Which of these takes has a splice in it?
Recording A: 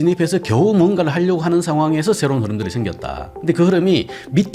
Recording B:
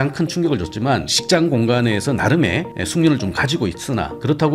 B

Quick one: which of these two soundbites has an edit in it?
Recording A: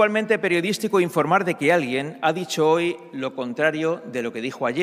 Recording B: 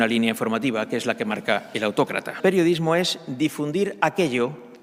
B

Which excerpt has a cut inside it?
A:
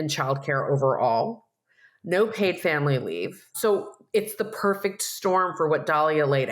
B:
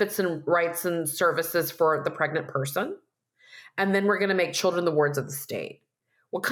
A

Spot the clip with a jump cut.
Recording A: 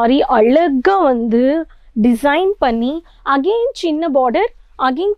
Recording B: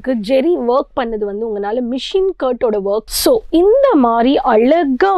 B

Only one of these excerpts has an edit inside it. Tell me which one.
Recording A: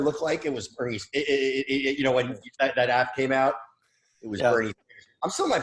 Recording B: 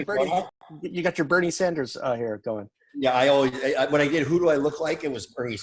B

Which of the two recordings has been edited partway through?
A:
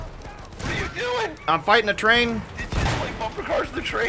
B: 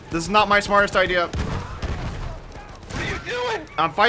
B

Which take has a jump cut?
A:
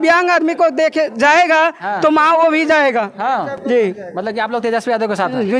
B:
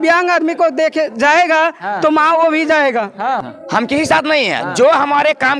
B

